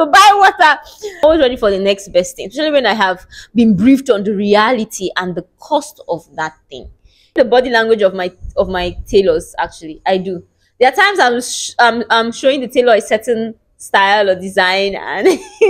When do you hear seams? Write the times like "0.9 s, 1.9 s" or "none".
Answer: 1.2 s, 7.4 s